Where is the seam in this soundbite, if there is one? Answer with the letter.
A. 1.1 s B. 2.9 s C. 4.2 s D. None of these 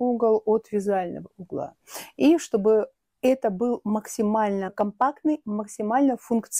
D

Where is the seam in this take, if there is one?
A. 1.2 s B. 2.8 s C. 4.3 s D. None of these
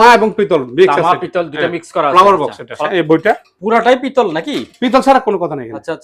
B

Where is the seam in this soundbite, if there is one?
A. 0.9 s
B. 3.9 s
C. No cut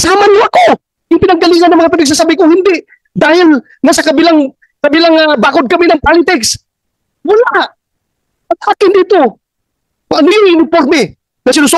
A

